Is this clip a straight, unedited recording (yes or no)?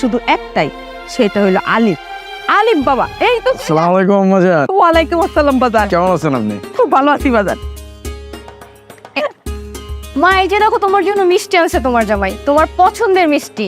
yes